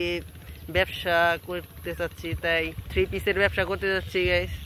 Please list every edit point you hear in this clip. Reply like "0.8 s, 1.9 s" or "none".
2.8 s